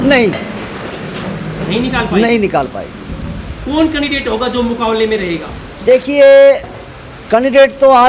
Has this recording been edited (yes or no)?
no